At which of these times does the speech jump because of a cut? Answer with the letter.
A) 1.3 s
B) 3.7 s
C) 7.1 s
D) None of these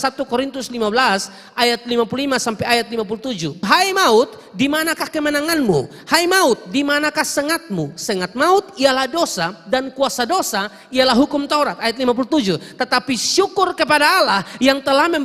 B